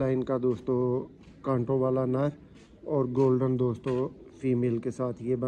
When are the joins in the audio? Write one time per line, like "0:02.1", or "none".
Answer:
none